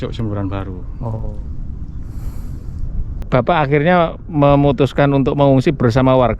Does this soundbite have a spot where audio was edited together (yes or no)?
yes